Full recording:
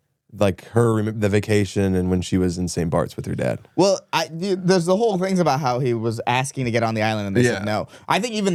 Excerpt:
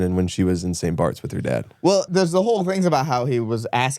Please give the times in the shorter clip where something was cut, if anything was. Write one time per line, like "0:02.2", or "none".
0:02.1